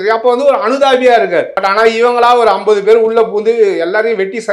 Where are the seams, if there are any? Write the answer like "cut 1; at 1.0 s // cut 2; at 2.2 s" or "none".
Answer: cut 1; at 1.5 s